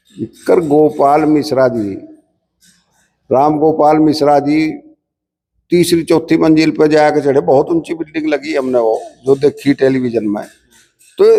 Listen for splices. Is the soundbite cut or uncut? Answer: uncut